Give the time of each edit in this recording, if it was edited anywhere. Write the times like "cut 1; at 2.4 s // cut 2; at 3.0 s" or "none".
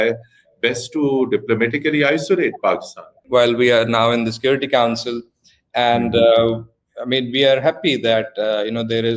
cut 1; at 3.2 s

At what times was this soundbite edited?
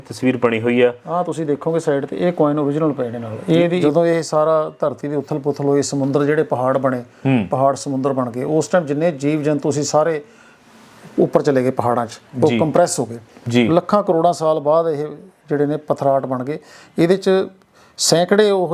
cut 1; at 3.8 s

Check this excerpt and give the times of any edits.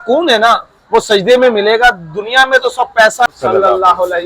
cut 1; at 3.3 s

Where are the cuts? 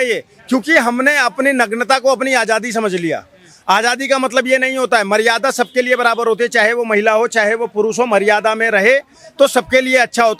none

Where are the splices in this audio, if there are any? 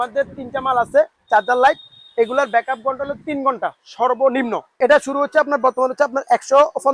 cut 1; at 4.7 s

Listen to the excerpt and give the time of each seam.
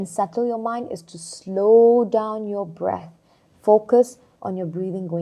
none

